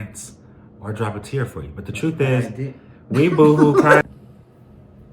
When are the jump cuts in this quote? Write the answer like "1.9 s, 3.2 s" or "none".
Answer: 4.0 s